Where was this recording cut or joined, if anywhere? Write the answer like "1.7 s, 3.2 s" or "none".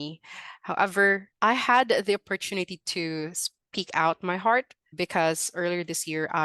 1.3 s, 4.8 s